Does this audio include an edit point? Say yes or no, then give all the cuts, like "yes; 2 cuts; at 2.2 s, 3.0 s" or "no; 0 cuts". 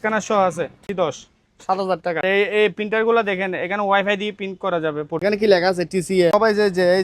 yes; 4 cuts; at 0.8 s, 2.2 s, 5.2 s, 6.3 s